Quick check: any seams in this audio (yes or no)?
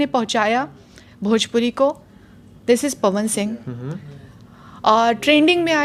no